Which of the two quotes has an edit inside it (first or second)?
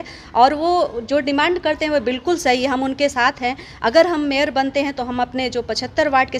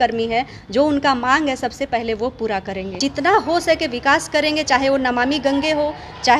second